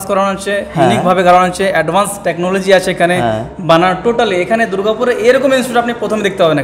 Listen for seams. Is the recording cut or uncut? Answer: uncut